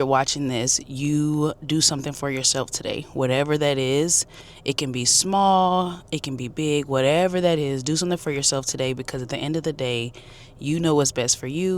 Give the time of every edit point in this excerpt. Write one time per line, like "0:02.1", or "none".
none